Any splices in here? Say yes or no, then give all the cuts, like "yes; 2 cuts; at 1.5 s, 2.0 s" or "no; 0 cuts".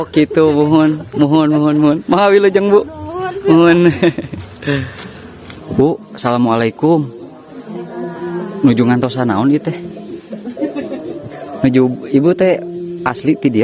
yes; 1 cut; at 5.5 s